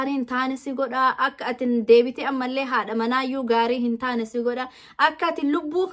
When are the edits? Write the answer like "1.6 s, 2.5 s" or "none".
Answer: none

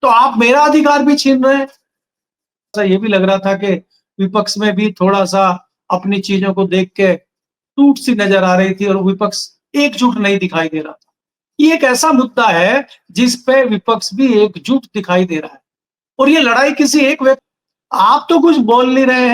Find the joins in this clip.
2.8 s, 17.4 s

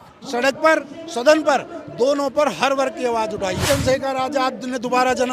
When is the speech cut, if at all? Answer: 3.6 s

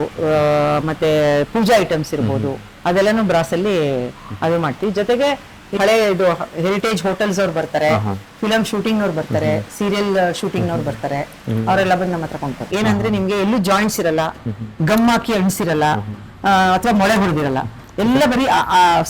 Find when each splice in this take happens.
5.8 s, 12.6 s

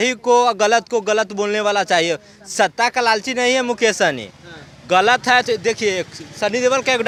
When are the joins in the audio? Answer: none

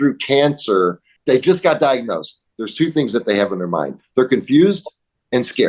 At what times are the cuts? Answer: 1.1 s

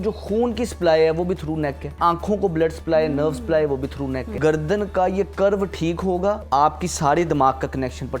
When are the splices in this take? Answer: 1.9 s, 4.3 s, 6.4 s

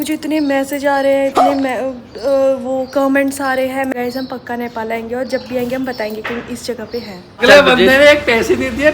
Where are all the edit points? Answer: 3.9 s, 7.5 s

